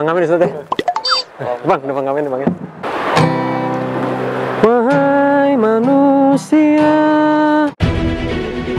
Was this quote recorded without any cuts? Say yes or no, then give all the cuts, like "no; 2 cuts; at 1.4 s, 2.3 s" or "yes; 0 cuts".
no; 1 cut; at 2.8 s